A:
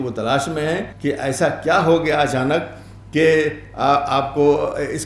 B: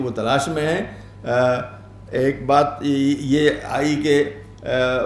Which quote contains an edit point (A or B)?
A